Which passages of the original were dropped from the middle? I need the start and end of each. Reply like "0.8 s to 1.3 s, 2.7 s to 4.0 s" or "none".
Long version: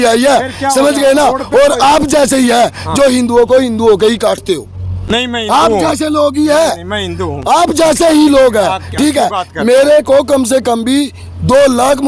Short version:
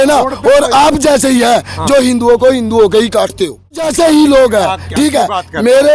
4.9 s to 7.8 s